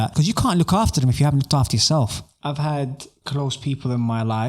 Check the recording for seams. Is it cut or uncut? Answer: cut